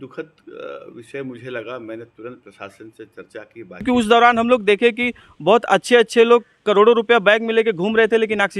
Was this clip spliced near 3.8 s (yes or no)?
yes